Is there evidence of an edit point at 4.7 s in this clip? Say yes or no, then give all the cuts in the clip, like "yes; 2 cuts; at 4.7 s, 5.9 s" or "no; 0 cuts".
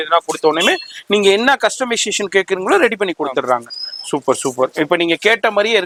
no; 0 cuts